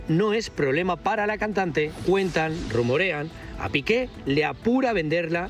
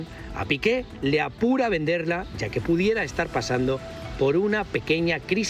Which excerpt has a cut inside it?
first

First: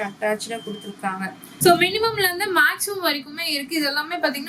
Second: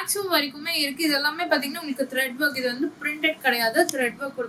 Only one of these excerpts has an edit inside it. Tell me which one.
first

